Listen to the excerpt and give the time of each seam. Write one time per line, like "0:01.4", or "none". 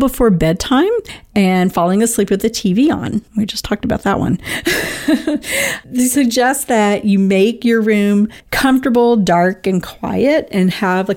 0:01.2
0:03.3
0:08.4